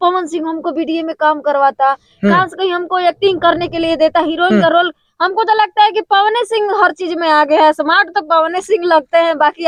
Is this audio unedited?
yes; 0 cuts

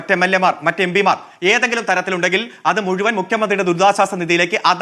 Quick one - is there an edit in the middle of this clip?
no; 0 cuts

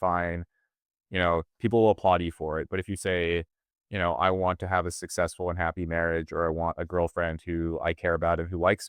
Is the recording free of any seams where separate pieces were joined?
yes; 0 cuts

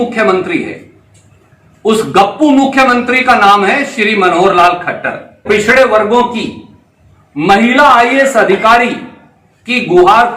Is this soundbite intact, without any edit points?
no; 1 cut; at 5.4 s

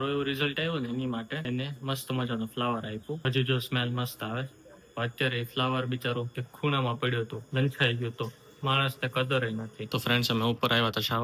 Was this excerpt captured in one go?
no; 5 cuts; at 1.4 s, 3.2 s, 6.4 s, 7.4 s, 10.0 s

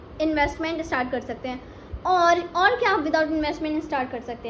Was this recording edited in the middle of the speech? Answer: no; 0 cuts

